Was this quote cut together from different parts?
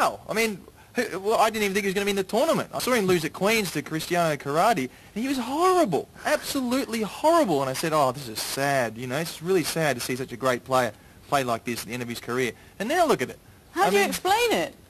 yes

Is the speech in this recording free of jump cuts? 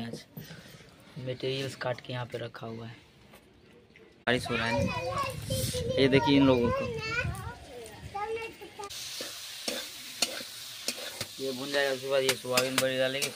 no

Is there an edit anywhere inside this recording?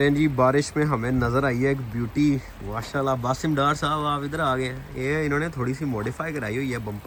no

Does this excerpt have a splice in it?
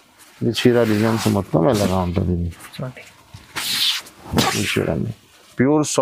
no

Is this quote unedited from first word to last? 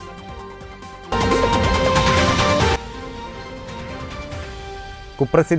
no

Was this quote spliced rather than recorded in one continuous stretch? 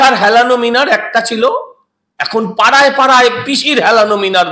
no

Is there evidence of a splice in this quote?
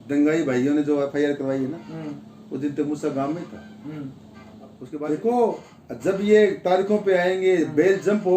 yes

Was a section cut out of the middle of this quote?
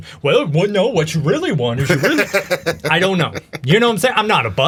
no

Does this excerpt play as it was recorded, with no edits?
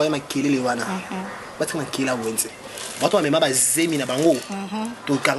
yes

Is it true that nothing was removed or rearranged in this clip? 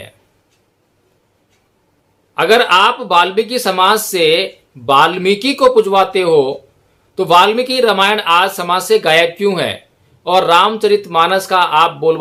yes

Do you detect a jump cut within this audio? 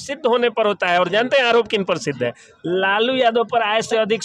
no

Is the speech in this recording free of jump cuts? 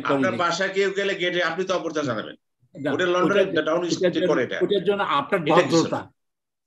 yes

